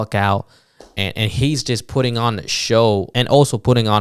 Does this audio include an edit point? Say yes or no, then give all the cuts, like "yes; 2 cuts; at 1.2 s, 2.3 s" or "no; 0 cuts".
yes; 1 cut; at 3.1 s